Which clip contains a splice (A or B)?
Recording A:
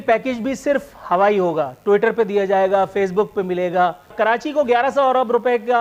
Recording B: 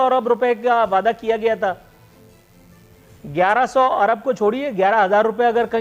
A